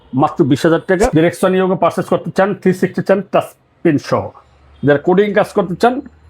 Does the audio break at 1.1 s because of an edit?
yes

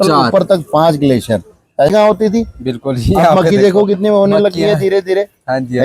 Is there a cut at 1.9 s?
yes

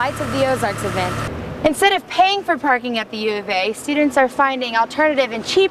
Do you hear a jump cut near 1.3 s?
yes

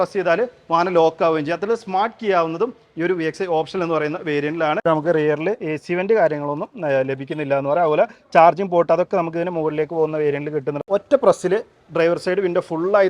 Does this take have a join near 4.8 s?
yes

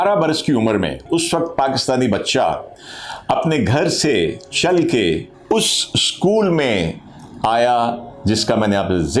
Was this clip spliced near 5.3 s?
yes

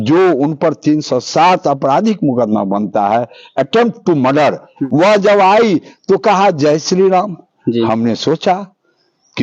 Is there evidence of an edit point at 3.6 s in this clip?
no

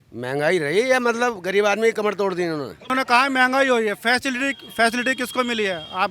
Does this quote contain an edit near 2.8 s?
yes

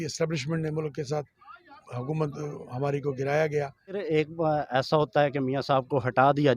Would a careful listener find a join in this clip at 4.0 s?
yes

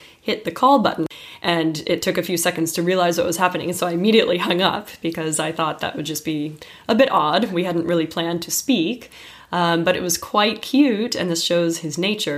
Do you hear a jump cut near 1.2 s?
yes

